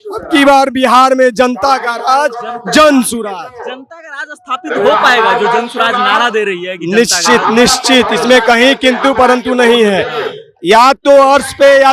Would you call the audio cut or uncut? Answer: uncut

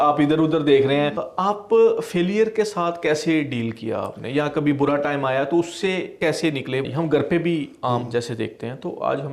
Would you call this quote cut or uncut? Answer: cut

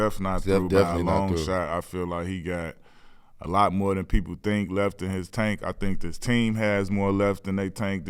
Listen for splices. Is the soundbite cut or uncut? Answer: cut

